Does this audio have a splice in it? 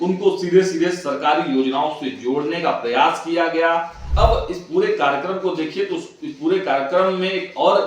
yes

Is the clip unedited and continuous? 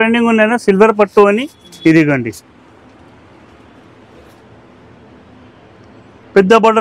yes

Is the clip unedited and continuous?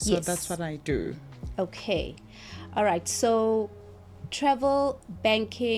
yes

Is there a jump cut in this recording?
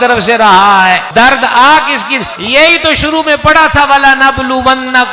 yes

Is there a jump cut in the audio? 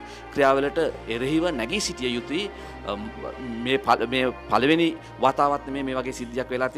no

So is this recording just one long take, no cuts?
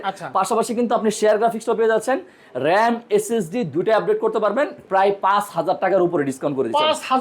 no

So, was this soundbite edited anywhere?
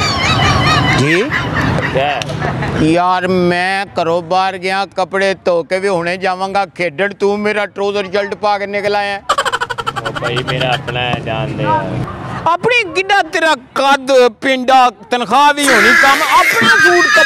yes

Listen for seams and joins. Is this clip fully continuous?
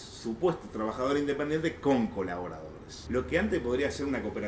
no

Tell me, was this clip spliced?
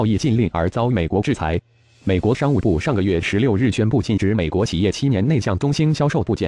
yes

